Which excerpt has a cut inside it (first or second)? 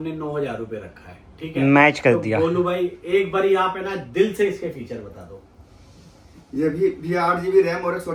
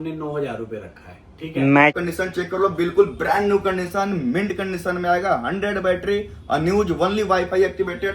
second